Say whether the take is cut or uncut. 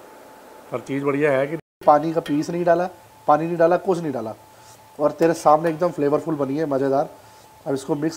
cut